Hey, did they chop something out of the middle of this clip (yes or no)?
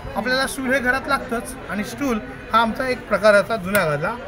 no